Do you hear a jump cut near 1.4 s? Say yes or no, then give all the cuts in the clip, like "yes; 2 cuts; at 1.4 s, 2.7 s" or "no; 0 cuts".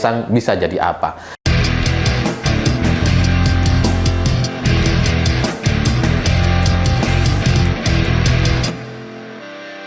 yes; 1 cut; at 1.4 s